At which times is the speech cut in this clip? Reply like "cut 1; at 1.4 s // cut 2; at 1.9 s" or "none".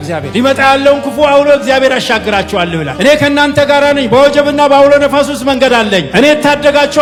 none